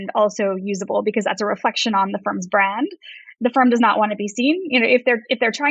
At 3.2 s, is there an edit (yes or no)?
yes